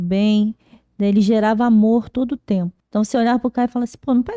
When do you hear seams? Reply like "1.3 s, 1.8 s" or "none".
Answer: 2.8 s